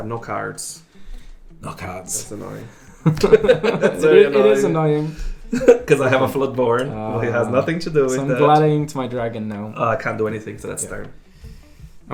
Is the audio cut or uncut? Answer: uncut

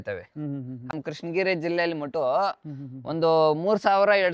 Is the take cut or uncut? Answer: cut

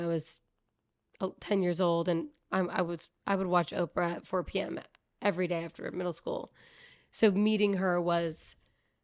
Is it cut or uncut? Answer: uncut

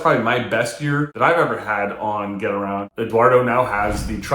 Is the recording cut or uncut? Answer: cut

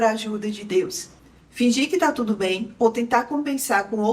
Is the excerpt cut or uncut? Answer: cut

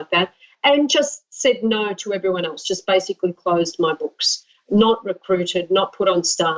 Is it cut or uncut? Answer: uncut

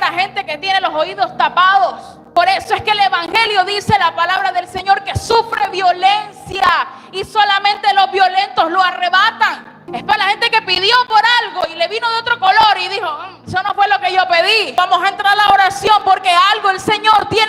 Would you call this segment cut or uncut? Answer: cut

